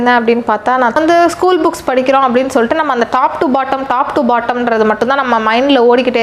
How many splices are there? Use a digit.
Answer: 1